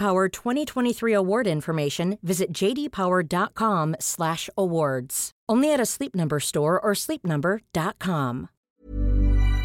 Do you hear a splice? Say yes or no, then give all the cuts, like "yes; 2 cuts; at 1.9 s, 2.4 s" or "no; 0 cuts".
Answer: yes; 1 cut; at 8.6 s